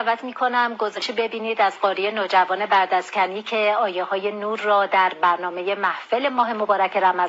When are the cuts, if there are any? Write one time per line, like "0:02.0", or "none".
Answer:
0:01.0